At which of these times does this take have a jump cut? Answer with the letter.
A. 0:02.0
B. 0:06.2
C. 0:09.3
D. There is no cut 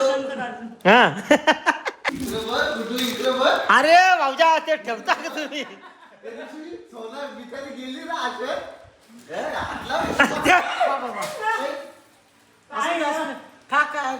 A